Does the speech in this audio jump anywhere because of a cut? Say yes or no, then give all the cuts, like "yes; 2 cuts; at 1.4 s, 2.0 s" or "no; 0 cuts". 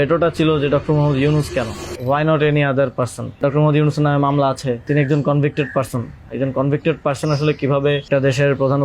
yes; 4 cuts; at 1.9 s, 3.4 s, 4.8 s, 8.1 s